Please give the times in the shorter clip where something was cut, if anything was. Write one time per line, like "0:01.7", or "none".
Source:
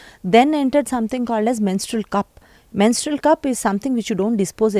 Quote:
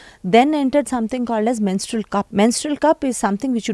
0:02.3